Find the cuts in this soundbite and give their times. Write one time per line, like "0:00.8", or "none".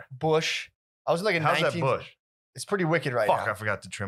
none